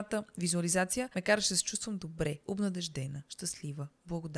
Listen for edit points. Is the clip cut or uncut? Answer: cut